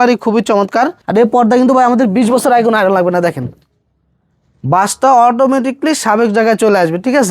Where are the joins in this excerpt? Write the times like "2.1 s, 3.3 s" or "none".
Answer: 1.0 s